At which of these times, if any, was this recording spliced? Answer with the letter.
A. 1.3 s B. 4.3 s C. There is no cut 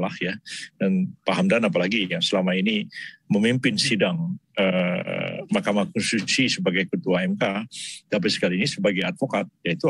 C